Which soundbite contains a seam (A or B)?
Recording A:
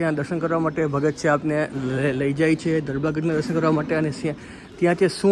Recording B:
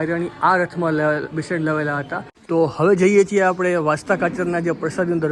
B